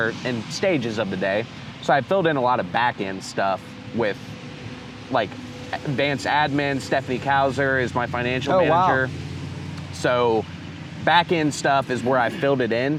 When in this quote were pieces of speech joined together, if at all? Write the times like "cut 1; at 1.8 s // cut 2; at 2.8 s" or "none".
none